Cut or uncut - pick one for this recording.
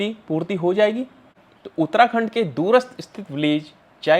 cut